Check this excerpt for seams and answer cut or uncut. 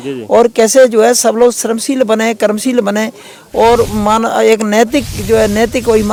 uncut